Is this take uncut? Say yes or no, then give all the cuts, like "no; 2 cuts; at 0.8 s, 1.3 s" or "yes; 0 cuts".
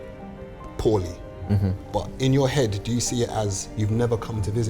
no; 1 cut; at 3.6 s